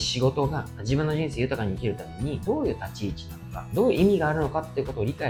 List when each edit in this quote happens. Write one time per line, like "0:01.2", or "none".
none